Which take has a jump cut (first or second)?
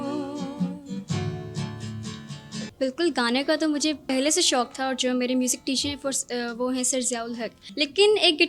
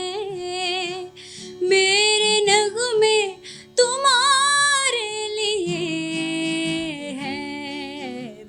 first